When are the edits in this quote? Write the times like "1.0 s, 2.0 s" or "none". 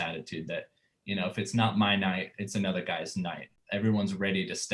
3.6 s